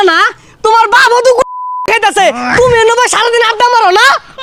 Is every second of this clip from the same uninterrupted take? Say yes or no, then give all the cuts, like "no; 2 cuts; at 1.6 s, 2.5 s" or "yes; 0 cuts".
yes; 0 cuts